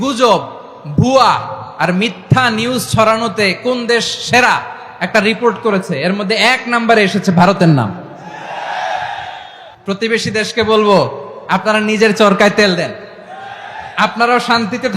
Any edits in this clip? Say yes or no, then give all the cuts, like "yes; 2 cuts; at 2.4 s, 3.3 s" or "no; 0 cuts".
no; 0 cuts